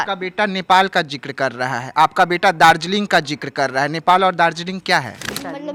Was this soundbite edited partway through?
no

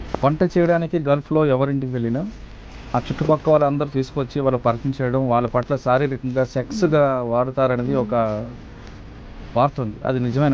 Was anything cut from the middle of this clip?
no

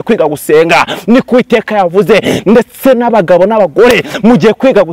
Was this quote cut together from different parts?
no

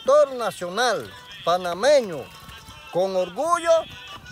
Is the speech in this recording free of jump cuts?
no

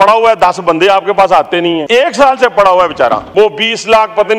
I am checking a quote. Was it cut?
yes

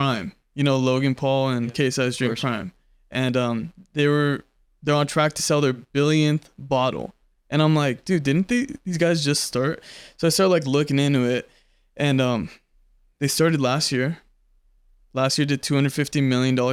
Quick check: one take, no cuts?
yes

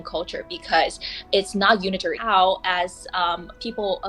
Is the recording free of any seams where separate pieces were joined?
no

